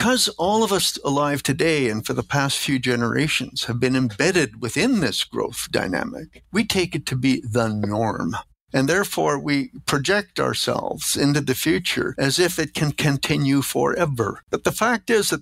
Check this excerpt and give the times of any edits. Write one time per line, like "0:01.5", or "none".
0:14.4